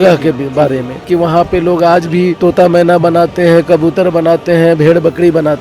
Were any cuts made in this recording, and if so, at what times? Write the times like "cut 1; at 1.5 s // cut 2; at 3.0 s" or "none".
cut 1; at 1.1 s // cut 2; at 2.4 s